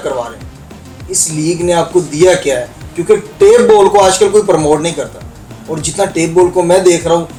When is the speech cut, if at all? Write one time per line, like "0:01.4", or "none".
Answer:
none